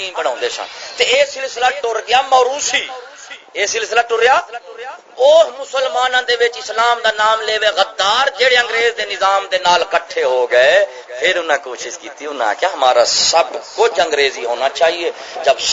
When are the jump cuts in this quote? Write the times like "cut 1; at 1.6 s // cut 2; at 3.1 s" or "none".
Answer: none